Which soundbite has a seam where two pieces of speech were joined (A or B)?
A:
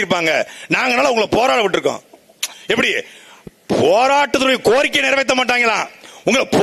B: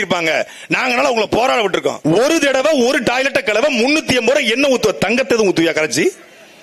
B